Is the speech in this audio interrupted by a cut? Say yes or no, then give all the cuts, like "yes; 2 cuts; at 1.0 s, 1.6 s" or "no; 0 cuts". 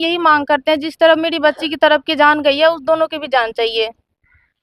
no; 0 cuts